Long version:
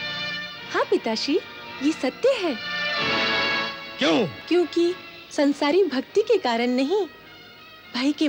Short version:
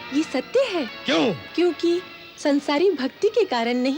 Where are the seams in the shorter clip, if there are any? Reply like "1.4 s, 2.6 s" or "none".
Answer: 1.0 s